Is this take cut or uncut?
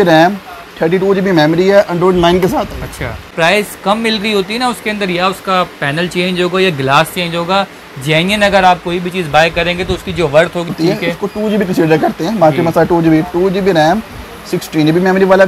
cut